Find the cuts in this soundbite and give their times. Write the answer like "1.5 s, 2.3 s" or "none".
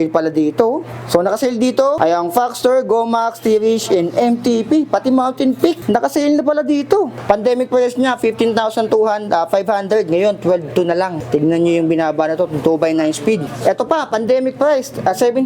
0.9 s, 2.0 s, 5.8 s, 7.2 s, 11.2 s, 13.5 s

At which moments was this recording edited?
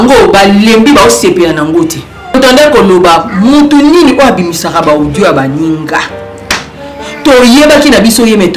2.4 s

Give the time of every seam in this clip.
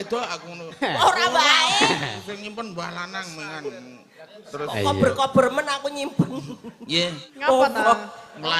7.3 s

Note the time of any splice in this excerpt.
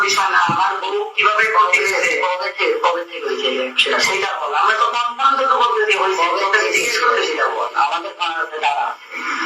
none

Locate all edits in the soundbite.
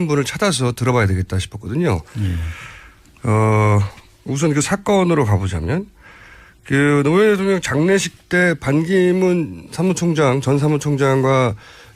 2.7 s

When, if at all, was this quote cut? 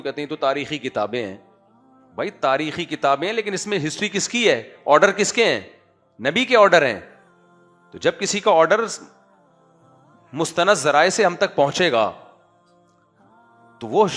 none

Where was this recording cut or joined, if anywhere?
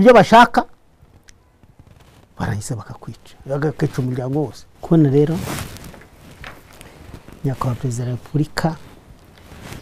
4.7 s

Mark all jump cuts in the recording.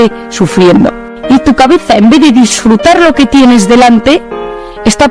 1.1 s

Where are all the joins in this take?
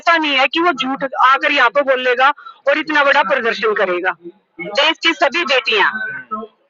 4.7 s

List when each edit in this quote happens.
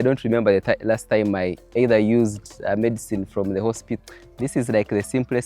4.0 s

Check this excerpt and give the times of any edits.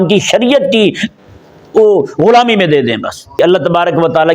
3.2 s

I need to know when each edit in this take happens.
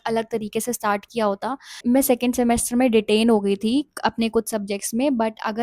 1.8 s

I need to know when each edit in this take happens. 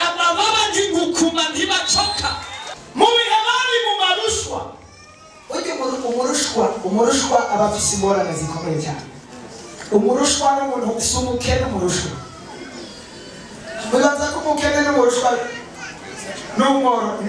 2.6 s

